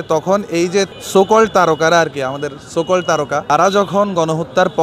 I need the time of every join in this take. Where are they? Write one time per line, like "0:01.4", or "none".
0:01.0
0:03.5